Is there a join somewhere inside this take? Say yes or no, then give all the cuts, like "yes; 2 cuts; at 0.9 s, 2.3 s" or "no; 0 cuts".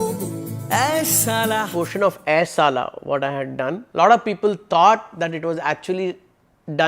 yes; 2 cuts; at 1.7 s, 3.8 s